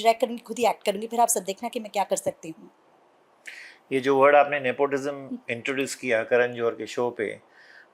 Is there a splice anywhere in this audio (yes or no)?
no